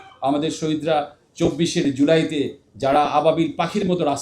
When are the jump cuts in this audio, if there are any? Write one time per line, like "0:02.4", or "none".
0:01.2